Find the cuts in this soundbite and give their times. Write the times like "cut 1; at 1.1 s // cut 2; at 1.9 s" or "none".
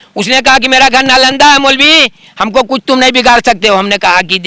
none